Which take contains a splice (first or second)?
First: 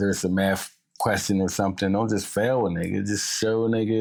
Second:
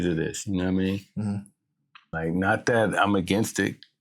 second